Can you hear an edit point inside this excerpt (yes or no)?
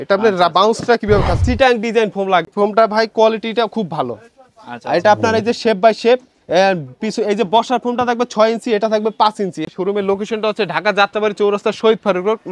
yes